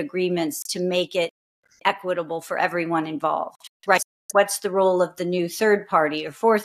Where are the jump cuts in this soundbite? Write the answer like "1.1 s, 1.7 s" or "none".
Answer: 4.0 s